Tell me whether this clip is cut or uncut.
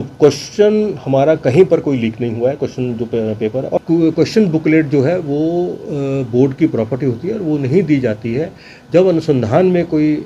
cut